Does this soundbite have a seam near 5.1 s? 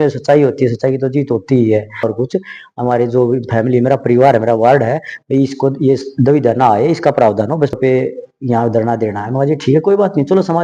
no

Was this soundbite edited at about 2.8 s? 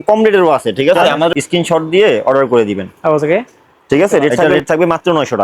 no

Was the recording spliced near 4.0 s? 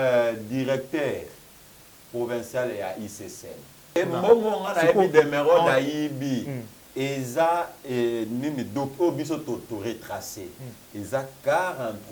yes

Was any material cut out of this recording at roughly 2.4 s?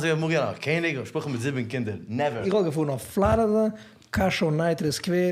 yes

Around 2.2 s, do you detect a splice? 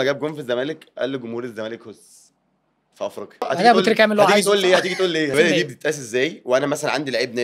no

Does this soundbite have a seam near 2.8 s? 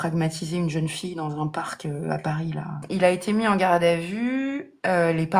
yes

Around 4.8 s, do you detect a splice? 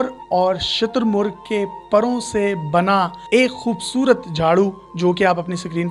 no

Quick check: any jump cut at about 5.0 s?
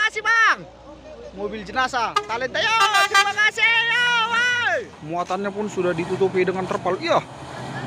yes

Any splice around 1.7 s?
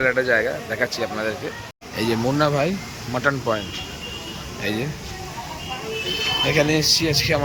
no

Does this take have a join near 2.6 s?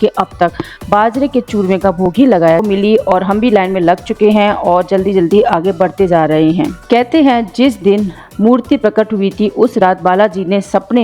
yes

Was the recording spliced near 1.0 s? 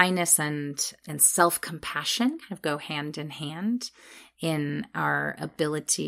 yes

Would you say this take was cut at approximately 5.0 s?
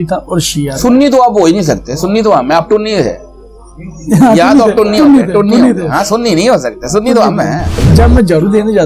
no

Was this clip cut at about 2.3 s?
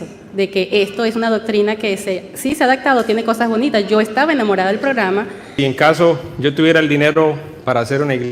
no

